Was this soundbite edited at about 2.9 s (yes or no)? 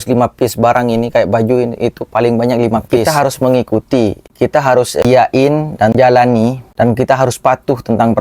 yes